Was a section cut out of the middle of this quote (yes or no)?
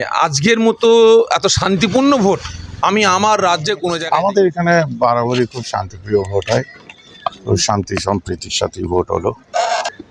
yes